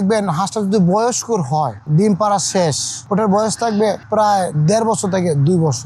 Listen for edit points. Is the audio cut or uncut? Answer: cut